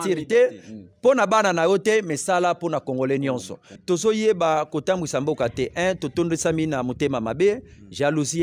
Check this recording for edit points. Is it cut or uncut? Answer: cut